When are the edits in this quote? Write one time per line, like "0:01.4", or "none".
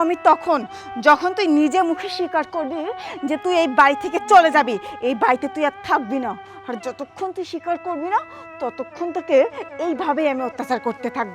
none